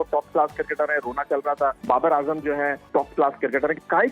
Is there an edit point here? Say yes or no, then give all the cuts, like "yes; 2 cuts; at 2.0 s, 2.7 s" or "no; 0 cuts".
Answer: yes; 2 cuts; at 1.8 s, 2.8 s